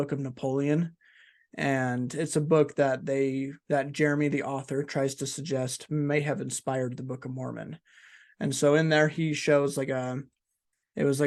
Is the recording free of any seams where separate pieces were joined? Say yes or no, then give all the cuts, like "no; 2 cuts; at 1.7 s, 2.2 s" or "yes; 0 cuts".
yes; 0 cuts